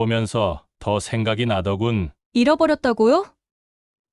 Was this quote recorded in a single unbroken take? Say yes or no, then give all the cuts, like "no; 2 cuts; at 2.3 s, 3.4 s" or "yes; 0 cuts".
no; 1 cut; at 2.2 s